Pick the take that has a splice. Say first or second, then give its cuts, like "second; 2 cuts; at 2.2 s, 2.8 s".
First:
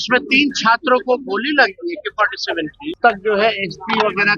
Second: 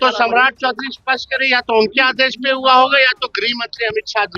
first; 1 cut; at 2.9 s